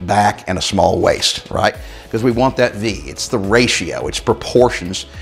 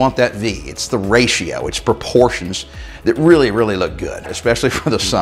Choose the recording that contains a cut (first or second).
second